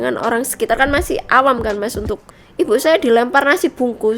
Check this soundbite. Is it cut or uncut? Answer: cut